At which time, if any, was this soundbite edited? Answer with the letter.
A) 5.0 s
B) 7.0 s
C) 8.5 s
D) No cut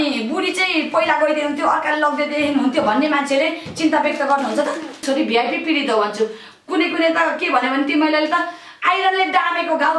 A